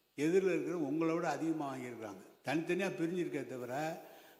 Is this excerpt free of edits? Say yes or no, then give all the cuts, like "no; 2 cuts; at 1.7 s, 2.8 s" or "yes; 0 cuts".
yes; 0 cuts